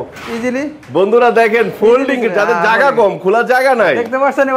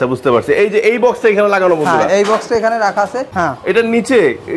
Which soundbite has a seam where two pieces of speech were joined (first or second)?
second